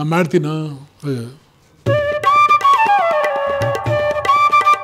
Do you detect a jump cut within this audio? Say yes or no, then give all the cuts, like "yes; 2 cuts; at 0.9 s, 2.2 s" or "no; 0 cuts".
yes; 1 cut; at 1.8 s